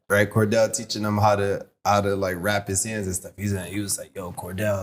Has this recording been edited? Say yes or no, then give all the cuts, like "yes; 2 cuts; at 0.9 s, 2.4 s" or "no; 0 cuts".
no; 0 cuts